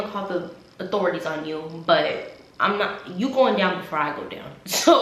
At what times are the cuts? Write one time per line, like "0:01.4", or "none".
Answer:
none